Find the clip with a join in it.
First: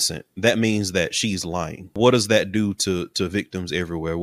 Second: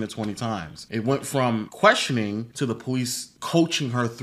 first; 1 cut; at 1.9 s

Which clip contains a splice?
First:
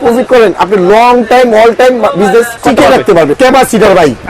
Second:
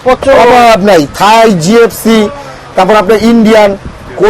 first; 2 cuts; at 2.5 s, 3.4 s

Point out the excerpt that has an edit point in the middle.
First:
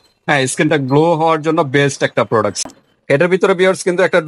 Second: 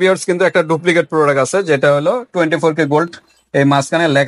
first; 1 cut; at 2.5 s

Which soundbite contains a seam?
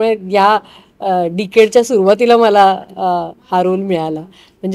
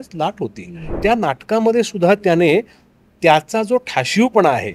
second; 1 cut; at 1.0 s

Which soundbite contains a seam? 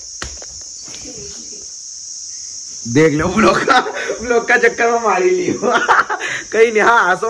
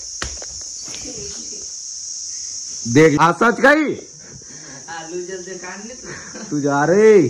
second; 1 cut; at 3.2 s

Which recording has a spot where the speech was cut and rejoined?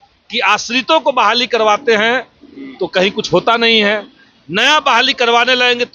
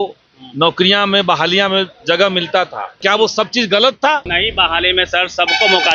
second; 2 cuts; at 2.9 s, 4.3 s

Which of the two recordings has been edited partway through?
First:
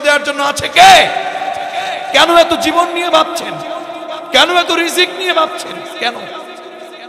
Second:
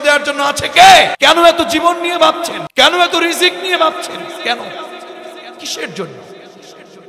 second; 2 cuts; at 1.1 s, 2.6 s

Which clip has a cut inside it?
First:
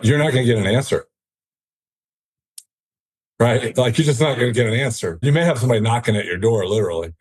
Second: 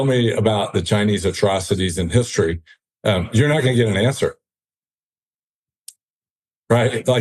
first; 1 cut; at 5.2 s

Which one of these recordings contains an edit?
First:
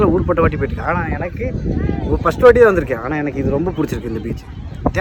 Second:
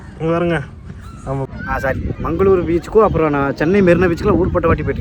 second; 1 cut; at 1.5 s

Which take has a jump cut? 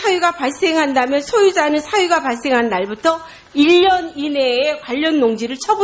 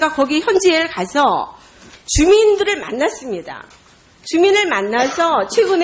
first; 1 cut; at 2.9 s

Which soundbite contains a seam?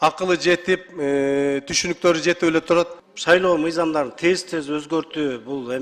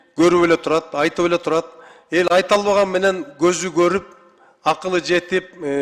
first; 1 cut; at 3.0 s

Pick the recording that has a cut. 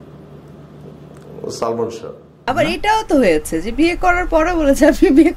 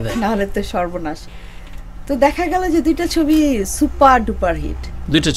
first; 1 cut; at 2.5 s

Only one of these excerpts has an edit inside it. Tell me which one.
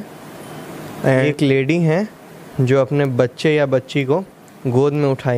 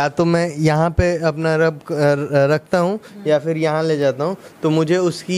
first; 1 cut; at 1.2 s

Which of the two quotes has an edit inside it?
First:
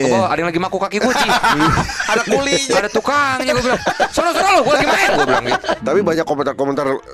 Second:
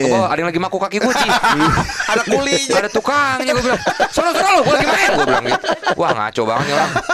first; 1 cut; at 5.8 s

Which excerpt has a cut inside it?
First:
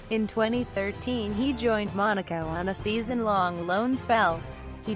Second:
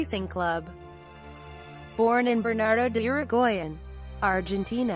first; 1 cut; at 3.1 s

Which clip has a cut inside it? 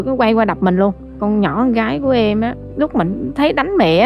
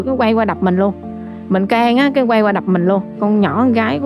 first; 2 cuts; at 1.1 s, 2.6 s

